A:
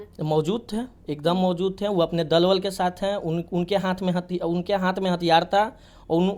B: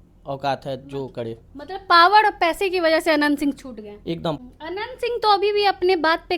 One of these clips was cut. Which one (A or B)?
B